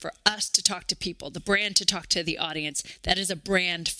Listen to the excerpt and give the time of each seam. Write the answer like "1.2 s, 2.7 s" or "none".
none